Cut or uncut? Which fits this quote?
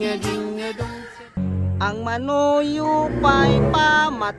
cut